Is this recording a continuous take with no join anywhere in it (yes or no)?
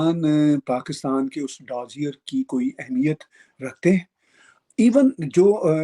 yes